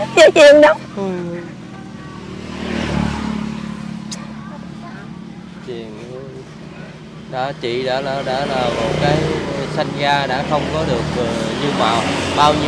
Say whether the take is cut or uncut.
uncut